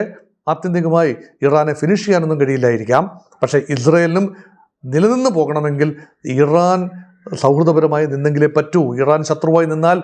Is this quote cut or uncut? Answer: uncut